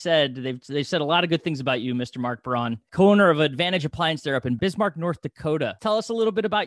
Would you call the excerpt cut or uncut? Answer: cut